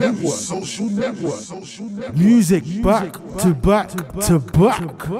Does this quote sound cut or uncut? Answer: uncut